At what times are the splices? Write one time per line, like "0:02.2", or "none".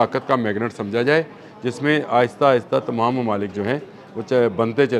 none